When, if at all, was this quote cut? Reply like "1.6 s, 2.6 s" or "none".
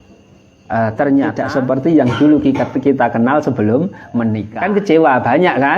1.4 s, 4.5 s